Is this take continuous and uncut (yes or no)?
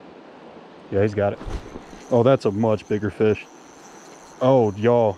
yes